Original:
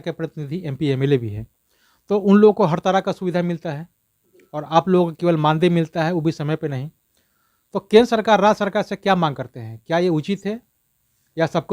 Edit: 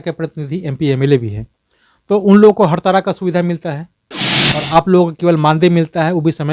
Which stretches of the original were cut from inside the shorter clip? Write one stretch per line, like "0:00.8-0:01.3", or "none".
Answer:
none